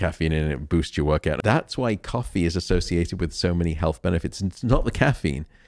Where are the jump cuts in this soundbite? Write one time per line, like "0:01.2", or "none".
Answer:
0:01.4